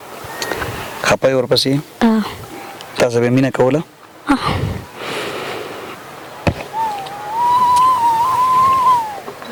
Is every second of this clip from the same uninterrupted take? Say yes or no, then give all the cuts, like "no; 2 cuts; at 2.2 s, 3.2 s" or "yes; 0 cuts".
yes; 0 cuts